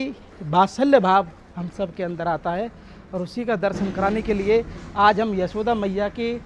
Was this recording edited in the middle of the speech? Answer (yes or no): no